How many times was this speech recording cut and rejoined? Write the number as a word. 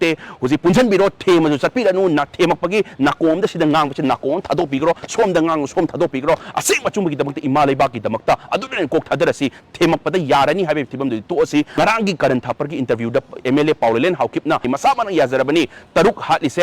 two